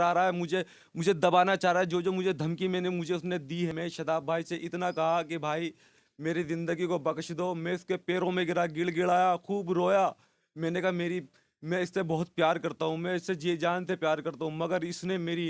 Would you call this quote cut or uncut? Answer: cut